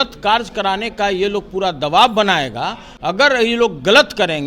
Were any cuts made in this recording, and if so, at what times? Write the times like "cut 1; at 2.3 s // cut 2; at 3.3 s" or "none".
cut 1; at 2.9 s